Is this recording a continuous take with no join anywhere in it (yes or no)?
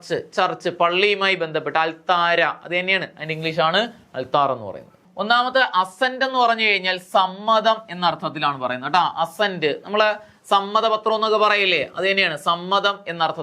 no